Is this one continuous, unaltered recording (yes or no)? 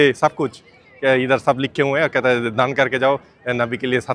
yes